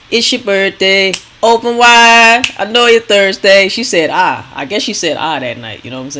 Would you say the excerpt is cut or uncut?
uncut